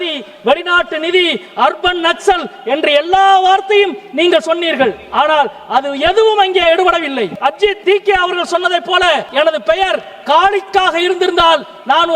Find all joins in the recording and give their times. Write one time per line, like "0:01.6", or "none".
0:07.4
0:09.3